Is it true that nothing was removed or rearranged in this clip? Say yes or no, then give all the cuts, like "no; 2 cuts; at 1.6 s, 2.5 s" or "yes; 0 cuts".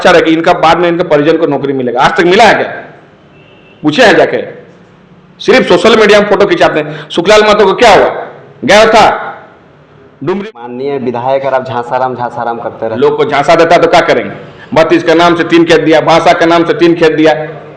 no; 1 cut; at 10.8 s